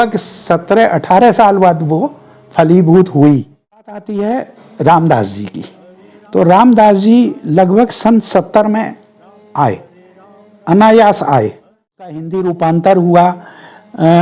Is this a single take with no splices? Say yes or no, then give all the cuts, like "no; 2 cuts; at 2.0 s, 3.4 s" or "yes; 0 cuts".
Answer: no; 2 cuts; at 4.0 s, 12.3 s